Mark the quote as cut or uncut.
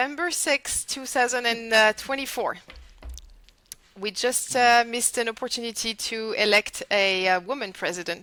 uncut